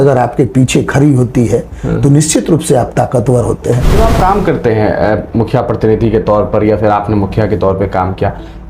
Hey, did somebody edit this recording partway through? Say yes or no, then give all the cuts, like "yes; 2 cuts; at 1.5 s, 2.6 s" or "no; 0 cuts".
yes; 1 cut; at 3.9 s